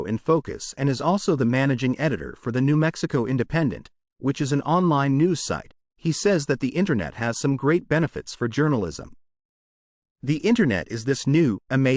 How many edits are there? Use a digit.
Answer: 1